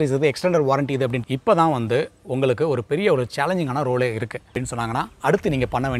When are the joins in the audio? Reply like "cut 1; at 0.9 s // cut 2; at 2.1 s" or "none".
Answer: cut 1; at 1.2 s // cut 2; at 4.6 s